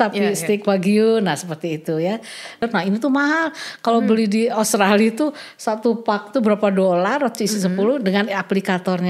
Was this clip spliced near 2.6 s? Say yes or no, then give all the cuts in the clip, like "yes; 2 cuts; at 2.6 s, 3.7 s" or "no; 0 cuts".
yes; 1 cut; at 2.6 s